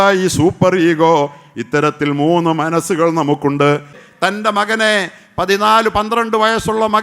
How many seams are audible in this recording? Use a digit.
1